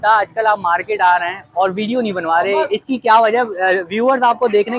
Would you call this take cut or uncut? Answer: uncut